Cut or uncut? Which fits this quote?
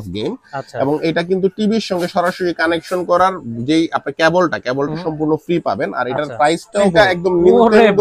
cut